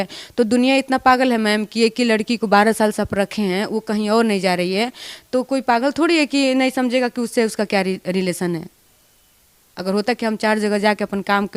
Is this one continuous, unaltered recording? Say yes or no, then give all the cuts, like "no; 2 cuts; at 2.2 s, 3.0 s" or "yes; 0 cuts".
yes; 0 cuts